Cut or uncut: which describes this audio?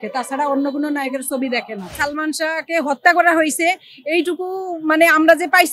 cut